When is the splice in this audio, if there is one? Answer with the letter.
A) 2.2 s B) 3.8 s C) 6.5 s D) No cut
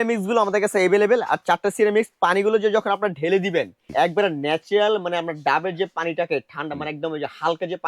B